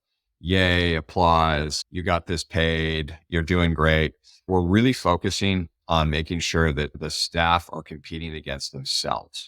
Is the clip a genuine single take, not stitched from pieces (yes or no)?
no